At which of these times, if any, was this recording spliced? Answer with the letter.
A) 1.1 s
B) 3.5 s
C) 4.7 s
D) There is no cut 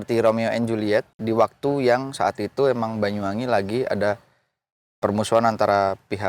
A